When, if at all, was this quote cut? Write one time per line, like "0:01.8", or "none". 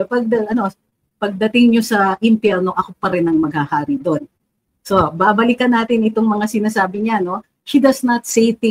none

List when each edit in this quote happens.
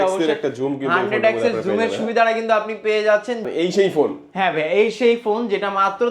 0:03.5

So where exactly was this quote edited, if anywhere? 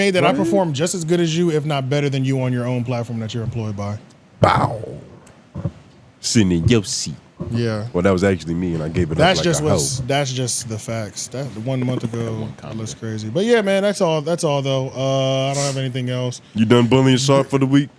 none

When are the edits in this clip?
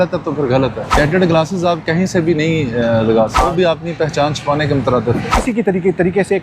0:00.9
0:03.4
0:05.4

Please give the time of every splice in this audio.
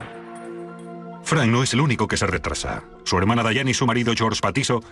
0:02.3

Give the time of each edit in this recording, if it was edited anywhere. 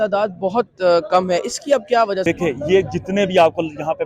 0:02.2

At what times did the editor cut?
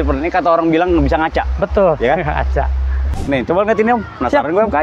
0:03.1

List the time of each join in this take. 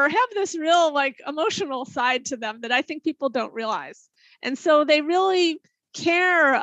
none

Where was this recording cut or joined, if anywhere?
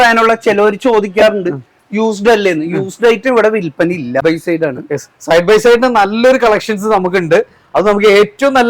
0:04.2

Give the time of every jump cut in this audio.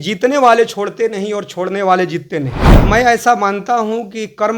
0:02.7

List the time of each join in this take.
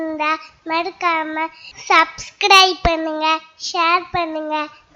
none

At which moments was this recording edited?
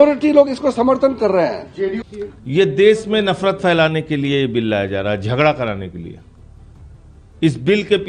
0:02.1

